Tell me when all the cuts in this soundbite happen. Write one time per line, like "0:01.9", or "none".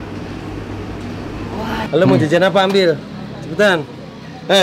0:01.9